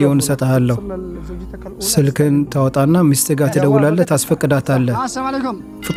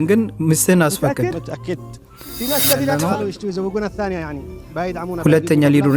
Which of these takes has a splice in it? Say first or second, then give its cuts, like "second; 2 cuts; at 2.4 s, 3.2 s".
second; 1 cut; at 2.9 s